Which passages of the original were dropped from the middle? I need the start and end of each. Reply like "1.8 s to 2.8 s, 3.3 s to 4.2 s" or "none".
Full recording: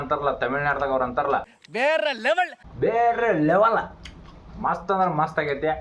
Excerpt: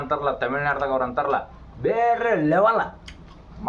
1.6 s to 2.6 s